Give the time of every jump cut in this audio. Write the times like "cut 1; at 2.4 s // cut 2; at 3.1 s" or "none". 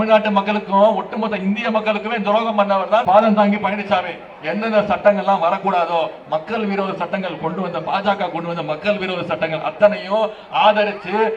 cut 1; at 3.0 s